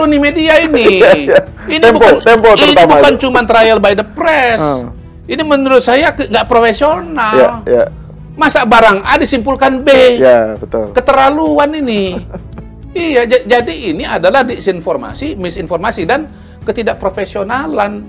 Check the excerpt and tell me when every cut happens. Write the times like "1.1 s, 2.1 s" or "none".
none